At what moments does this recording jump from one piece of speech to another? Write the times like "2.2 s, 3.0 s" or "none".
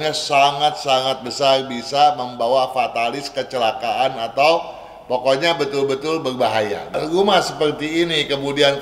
6.9 s